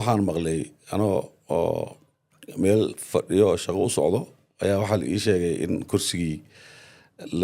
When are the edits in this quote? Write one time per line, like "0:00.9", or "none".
none

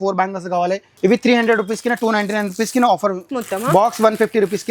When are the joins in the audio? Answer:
0:00.9
0:03.3

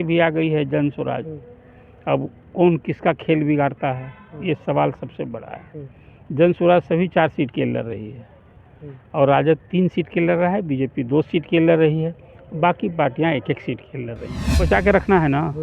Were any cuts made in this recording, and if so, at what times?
0:14.7

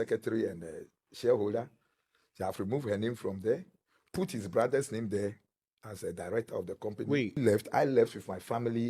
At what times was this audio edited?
0:07.4

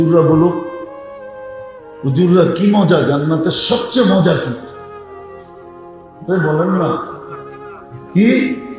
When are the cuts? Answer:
0:04.6
0:06.2

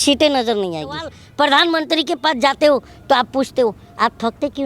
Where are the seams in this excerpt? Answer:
0:01.2

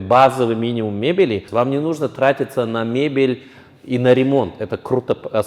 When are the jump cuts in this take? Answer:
0:01.4

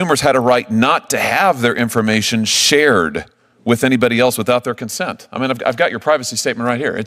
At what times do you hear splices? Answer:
none

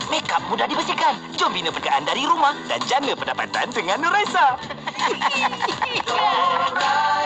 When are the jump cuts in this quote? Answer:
0:01.8

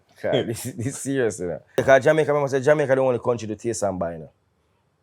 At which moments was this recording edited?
0:01.8

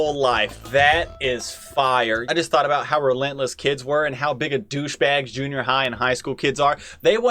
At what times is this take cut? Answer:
0:02.2

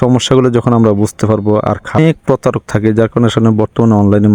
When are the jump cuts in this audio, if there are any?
0:02.0

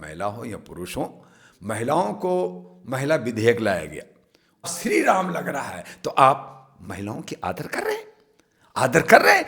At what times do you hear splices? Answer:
0:04.6

